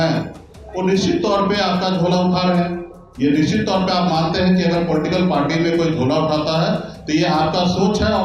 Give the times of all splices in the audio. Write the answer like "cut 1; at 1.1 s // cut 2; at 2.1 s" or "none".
none